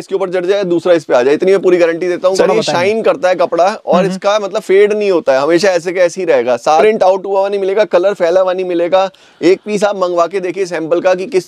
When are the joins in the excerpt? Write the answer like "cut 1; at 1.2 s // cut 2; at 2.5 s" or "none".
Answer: cut 1; at 2.3 s // cut 2; at 6.8 s